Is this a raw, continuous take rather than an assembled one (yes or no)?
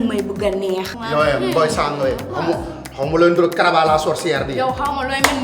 no